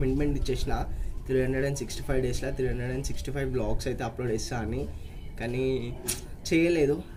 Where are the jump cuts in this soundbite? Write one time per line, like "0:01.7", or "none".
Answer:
none